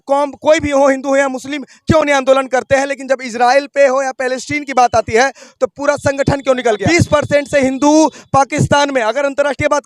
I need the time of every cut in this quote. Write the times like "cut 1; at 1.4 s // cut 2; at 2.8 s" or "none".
cut 1; at 6.8 s